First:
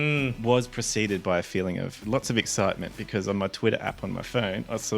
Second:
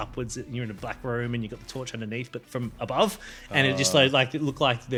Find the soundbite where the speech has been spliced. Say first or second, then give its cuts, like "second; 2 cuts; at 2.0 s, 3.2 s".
first; 1 cut; at 1.9 s